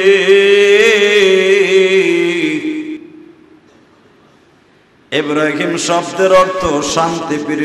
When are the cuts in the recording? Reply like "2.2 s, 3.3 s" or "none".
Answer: none

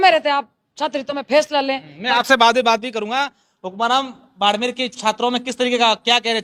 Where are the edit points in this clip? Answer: none

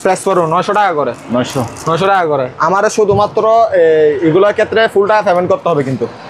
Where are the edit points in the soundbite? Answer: none

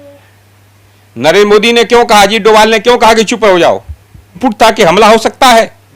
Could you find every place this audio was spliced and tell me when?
4.4 s

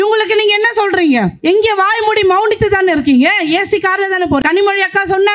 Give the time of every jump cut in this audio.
1.3 s, 4.4 s

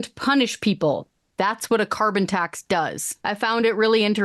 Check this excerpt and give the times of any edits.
3.1 s

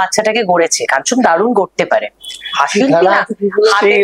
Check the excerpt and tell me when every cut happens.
none

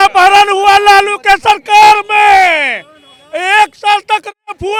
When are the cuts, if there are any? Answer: none

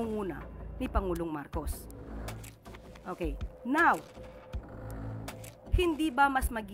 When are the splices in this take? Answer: 1.7 s, 3.0 s, 4.0 s, 5.7 s

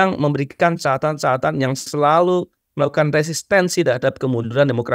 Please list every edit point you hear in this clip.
none

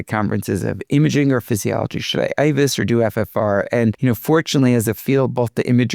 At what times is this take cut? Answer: 4.0 s

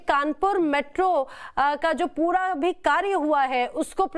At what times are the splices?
none

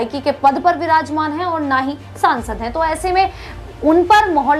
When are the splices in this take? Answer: none

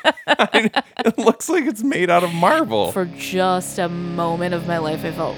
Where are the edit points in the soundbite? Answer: 2.8 s

